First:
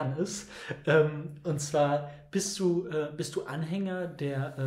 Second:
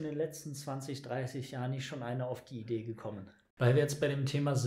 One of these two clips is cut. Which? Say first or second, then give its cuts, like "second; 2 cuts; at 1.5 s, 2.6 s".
second; 1 cut; at 3.4 s